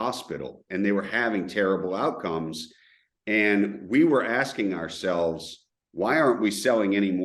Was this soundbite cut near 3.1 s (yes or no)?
no